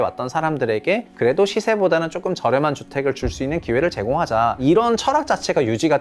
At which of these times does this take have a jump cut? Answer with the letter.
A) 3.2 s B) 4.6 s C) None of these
B